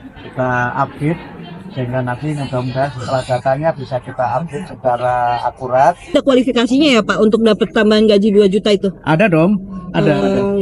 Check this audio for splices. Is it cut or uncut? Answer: cut